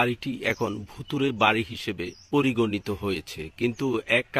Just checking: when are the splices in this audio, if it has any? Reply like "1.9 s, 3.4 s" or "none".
none